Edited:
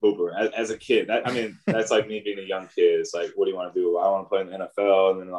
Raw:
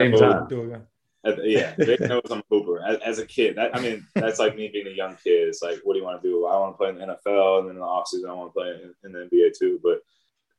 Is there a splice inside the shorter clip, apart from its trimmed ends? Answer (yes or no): no